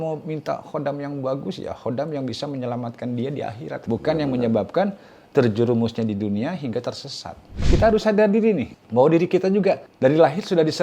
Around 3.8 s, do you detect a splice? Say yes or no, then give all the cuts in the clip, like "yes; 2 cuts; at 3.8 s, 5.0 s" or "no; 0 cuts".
yes; 4 cuts; at 3.8 s, 7.7 s, 8.8 s, 9.9 s